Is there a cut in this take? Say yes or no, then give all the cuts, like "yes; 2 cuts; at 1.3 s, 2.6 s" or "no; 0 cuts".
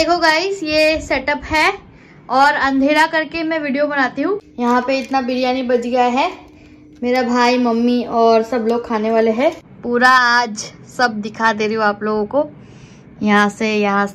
yes; 2 cuts; at 4.5 s, 9.7 s